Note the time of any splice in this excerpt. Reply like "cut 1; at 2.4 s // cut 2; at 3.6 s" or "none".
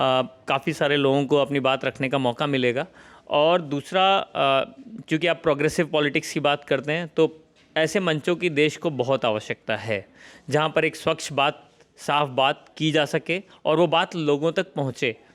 none